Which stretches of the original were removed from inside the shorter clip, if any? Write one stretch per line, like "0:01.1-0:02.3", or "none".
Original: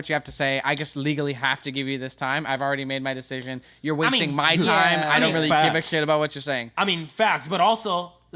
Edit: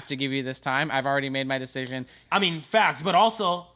0:03.7-0:06.6

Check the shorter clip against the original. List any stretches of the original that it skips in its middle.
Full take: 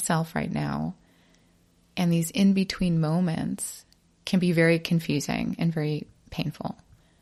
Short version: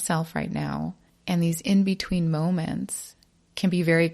0:01.1-0:01.8

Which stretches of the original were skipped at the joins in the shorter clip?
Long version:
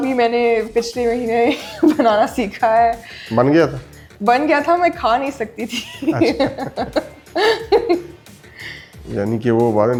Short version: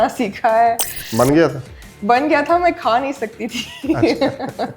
none

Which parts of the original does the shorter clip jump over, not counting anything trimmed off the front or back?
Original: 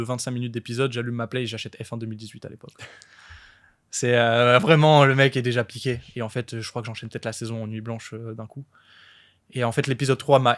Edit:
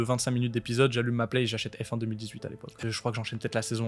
0:02.8-0:06.5

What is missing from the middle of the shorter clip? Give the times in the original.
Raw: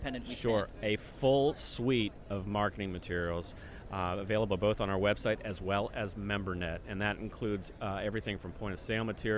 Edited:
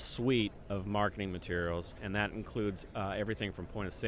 0:03.6-0:06.8

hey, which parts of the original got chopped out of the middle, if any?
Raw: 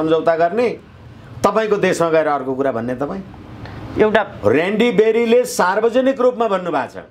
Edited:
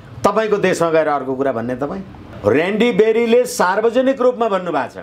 0:03.5-0:04.3

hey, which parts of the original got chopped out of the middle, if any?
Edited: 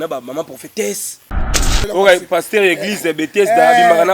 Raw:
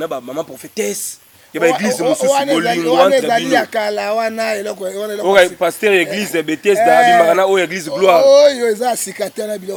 0:01.5-0:04.8

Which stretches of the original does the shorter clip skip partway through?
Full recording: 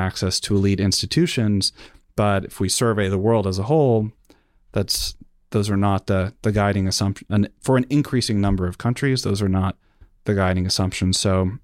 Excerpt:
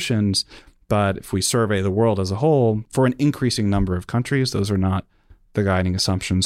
0:04.1-0:07.6

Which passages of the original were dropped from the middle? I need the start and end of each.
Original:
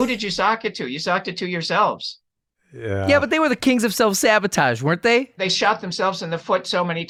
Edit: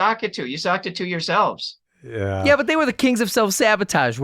0:02.8-0:03.0

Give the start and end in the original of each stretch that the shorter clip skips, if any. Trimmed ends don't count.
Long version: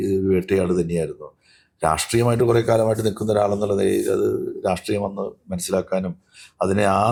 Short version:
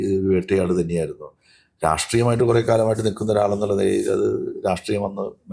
none

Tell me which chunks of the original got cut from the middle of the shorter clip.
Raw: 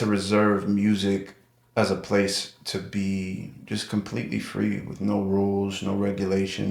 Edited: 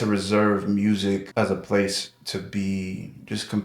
0:01.3-0:01.7

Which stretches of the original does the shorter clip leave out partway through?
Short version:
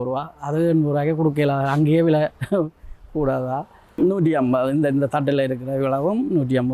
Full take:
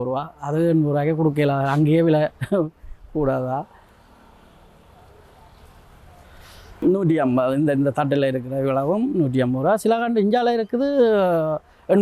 0:03.8-0:06.6

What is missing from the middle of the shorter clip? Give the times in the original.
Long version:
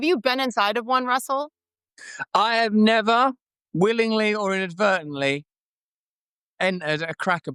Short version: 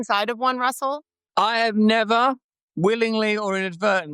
0:01.6-0:02.1

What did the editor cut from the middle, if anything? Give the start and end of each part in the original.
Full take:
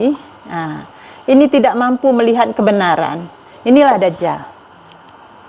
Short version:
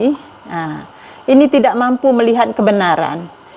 none

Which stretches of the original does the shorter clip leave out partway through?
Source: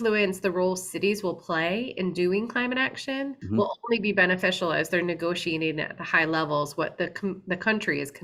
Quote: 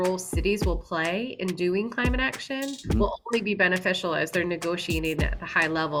none

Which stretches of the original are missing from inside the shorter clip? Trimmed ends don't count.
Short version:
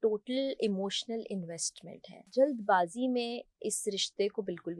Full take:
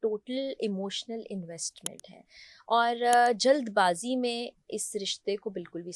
0:02.3-0:03.4

